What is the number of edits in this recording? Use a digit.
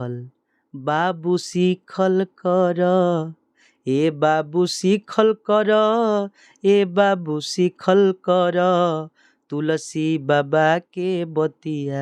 0